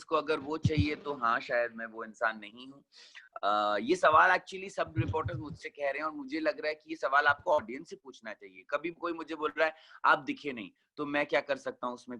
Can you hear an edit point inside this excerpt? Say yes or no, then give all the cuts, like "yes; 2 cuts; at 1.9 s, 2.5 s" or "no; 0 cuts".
no; 0 cuts